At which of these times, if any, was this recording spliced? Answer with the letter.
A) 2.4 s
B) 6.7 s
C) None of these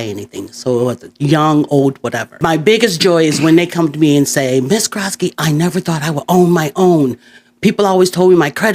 A